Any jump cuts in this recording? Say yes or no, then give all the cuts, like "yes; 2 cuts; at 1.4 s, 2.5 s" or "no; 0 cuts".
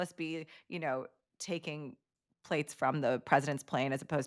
no; 0 cuts